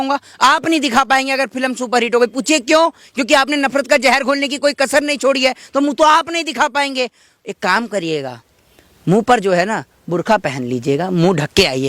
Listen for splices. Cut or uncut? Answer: uncut